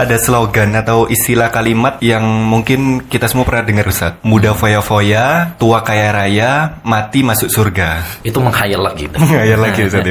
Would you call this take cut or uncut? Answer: cut